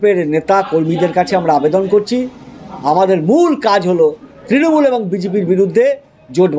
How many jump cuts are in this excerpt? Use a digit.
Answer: 0